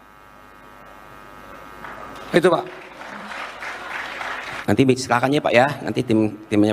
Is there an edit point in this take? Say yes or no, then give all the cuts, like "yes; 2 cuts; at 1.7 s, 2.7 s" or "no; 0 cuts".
yes; 1 cut; at 4.5 s